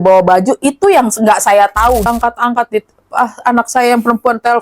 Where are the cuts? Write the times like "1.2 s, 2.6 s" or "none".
2.1 s